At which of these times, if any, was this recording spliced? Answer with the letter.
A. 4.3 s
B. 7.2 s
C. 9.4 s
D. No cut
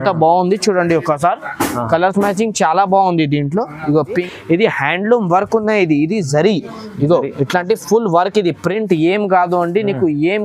A